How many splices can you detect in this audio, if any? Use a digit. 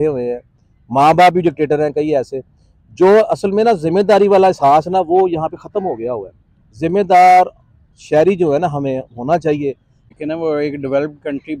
1